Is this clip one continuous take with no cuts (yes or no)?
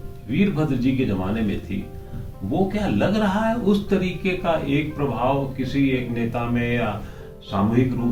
yes